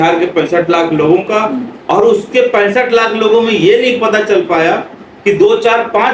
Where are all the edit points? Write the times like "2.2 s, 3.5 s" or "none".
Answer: none